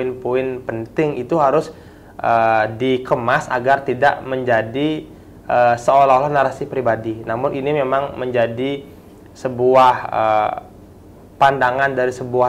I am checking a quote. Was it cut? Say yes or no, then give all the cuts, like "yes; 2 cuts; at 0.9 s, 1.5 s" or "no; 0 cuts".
no; 0 cuts